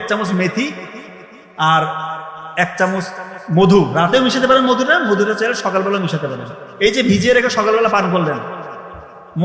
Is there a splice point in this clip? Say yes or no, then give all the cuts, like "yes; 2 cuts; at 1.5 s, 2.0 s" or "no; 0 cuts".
no; 0 cuts